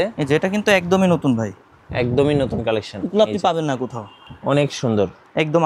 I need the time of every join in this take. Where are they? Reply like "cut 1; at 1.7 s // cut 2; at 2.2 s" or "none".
none